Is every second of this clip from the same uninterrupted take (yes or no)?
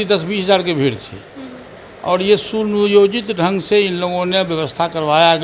yes